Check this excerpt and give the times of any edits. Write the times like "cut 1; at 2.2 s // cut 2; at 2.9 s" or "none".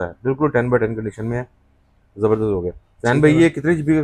none